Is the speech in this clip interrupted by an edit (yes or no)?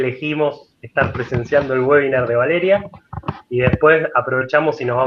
no